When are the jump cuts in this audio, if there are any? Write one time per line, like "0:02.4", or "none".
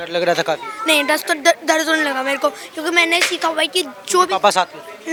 none